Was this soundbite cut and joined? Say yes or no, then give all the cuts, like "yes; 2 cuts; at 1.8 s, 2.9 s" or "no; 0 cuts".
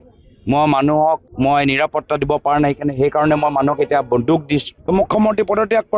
yes; 2 cuts; at 1.3 s, 4.7 s